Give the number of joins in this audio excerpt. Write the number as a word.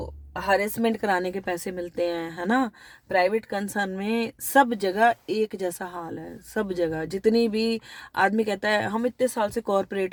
zero